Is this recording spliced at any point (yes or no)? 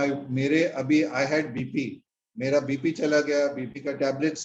no